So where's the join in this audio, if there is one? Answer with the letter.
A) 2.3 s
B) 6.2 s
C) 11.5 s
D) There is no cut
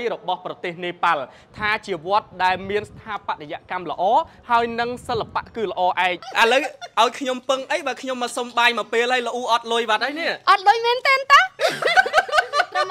B